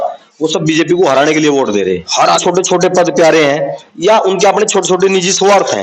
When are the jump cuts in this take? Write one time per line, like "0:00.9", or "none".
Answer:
0:02.4